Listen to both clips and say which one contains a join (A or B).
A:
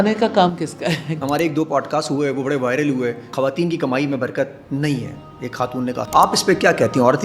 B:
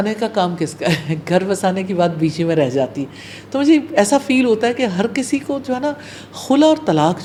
A